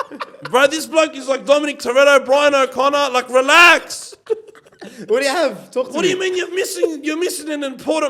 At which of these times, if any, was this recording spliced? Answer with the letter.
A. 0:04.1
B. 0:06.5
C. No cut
C